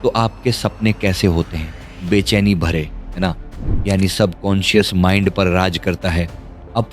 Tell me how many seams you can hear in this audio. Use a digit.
1